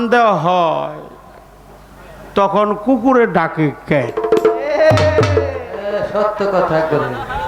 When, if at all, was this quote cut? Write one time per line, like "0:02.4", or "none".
none